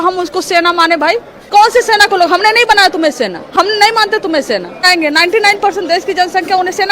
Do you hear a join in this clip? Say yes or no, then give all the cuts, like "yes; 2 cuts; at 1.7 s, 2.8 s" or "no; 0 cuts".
yes; 2 cuts; at 1.3 s, 4.9 s